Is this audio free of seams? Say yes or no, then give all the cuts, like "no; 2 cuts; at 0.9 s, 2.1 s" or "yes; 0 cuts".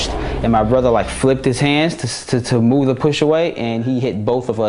yes; 0 cuts